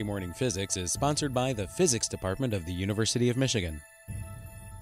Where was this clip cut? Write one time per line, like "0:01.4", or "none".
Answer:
0:03.9